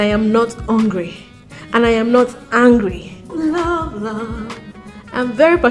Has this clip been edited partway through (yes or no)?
yes